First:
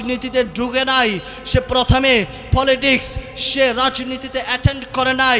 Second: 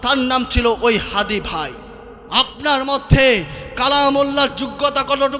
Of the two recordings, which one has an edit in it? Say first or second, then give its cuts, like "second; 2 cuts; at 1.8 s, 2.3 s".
second; 1 cut; at 2.1 s